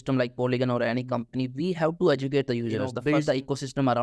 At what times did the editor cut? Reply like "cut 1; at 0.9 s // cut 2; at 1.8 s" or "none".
cut 1; at 2.9 s